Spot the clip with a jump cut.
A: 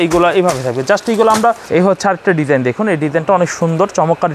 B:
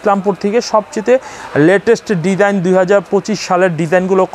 A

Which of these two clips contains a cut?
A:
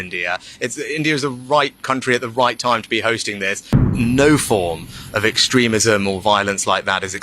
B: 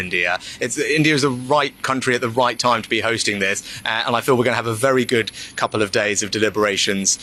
A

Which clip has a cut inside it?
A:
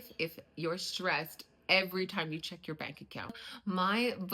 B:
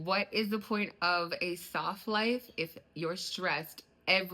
A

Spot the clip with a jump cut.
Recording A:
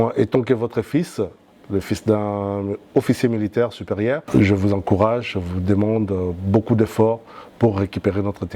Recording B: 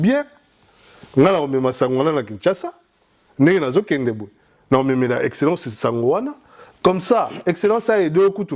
A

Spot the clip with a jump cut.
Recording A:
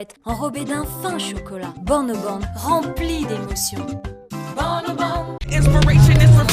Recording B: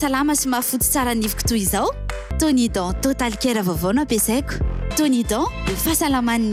A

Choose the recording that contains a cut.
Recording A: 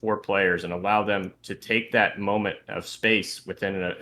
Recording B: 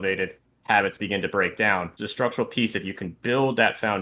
B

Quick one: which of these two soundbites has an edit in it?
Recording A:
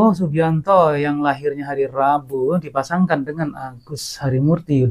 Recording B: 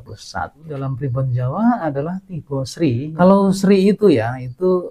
B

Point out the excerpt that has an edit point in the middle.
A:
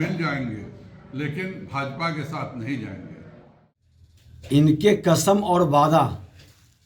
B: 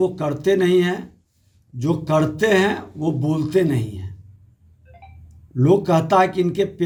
A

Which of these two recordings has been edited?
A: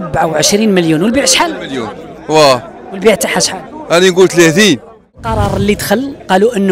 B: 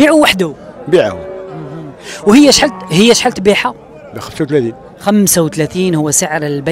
A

